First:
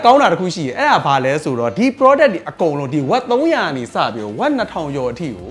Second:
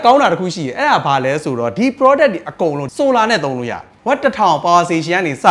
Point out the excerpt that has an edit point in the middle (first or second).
second